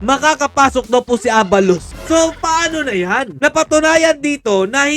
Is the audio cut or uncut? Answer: cut